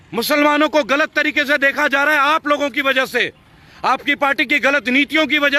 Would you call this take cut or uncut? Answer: uncut